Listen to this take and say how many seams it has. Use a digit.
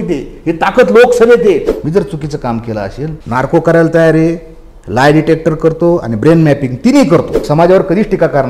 3